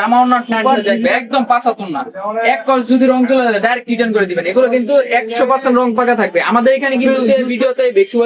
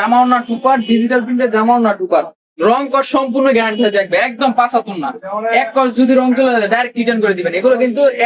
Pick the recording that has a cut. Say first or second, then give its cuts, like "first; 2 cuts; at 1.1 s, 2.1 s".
first; 2 cuts; at 0.8 s, 7.2 s